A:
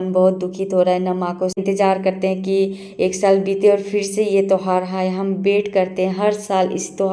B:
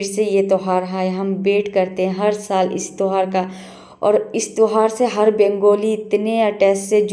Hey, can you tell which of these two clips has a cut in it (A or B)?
A